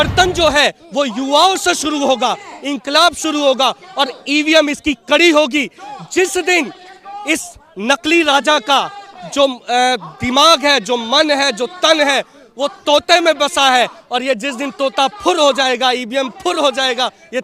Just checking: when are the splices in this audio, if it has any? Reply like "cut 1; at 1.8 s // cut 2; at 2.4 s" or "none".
none